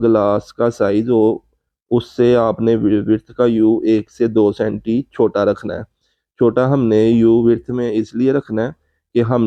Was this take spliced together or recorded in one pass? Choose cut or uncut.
uncut